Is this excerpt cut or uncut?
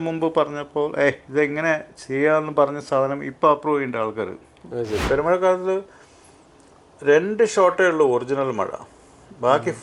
cut